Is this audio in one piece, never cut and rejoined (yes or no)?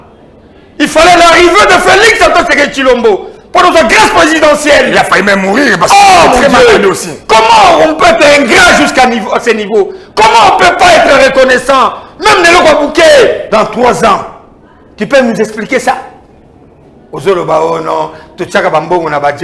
no